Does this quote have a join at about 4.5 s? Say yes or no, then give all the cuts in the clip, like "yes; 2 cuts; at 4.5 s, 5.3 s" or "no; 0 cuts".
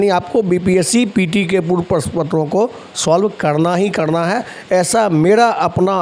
no; 0 cuts